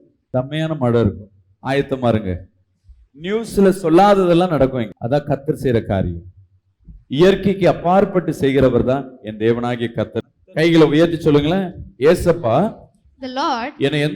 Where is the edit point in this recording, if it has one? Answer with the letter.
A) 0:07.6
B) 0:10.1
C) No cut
B